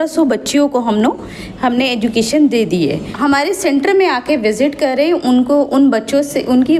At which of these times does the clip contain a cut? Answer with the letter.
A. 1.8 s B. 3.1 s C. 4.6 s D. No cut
B